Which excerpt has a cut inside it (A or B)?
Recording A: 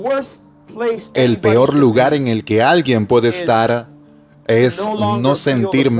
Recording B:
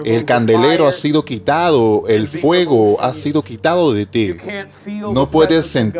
A